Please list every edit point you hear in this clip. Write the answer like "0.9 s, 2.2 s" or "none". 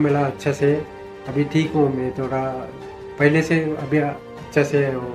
none